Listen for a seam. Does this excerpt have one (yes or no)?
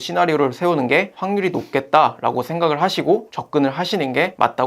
yes